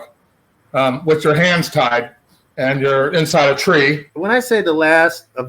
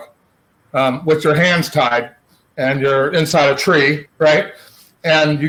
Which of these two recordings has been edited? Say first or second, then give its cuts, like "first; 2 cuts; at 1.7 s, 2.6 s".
first; 1 cut; at 4.0 s